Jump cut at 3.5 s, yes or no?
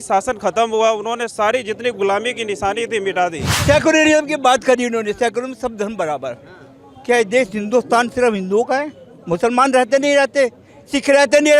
yes